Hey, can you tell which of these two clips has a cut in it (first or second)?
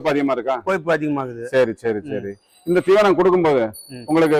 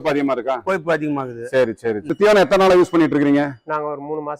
second